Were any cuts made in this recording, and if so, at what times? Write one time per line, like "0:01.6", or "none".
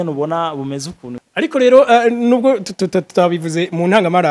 0:01.1